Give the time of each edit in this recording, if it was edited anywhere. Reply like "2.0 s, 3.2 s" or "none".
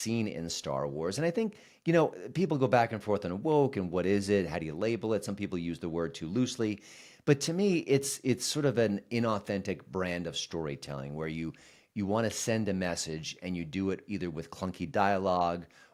none